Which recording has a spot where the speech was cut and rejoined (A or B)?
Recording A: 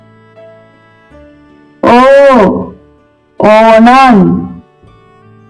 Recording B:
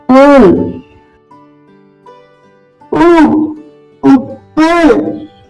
A